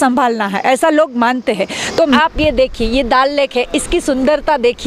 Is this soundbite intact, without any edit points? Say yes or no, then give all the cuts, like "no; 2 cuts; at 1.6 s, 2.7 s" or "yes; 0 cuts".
no; 1 cut; at 2.2 s